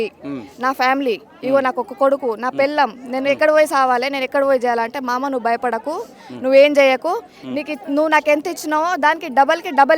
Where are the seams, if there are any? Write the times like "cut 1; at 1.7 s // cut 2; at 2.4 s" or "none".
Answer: none